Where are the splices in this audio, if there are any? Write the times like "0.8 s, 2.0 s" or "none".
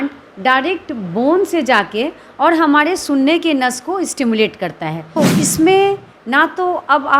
5.2 s

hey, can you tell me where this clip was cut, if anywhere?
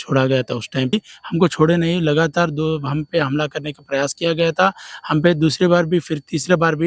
0.9 s

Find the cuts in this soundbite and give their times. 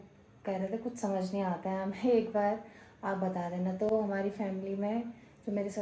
none

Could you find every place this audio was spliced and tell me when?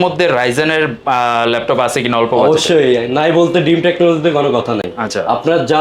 none

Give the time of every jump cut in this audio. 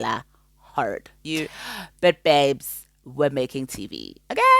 1.2 s

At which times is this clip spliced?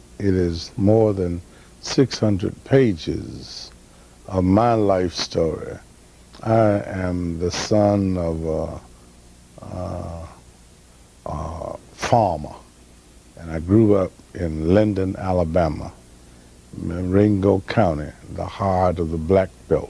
15.5 s

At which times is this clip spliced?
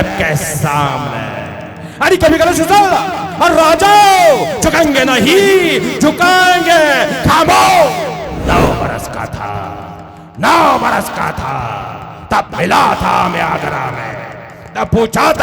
8.3 s

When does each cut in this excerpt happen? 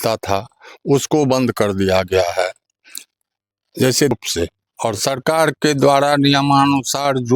4.1 s

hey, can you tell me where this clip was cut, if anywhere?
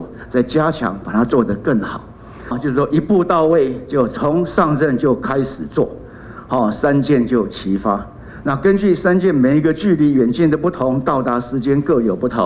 2.6 s

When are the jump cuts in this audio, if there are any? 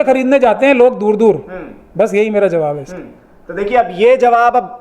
none

